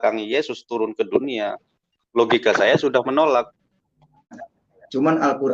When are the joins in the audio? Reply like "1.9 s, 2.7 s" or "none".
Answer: 4.4 s